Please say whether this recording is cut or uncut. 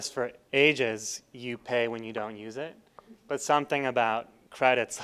uncut